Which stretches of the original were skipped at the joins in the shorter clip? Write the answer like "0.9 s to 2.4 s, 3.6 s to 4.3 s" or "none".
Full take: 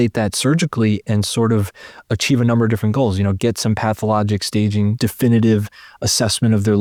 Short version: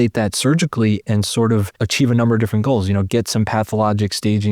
1.8 s to 2.1 s